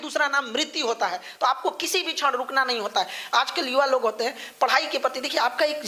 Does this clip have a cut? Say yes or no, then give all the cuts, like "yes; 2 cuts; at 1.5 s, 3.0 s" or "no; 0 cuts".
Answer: no; 0 cuts